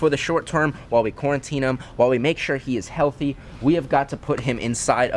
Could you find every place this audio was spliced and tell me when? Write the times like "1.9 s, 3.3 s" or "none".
none